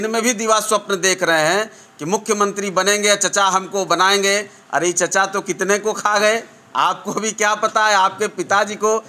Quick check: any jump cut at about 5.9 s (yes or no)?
no